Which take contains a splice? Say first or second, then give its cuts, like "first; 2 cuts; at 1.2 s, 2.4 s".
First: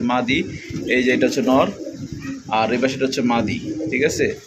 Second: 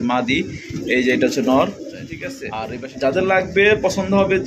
second; 1 cut; at 2.5 s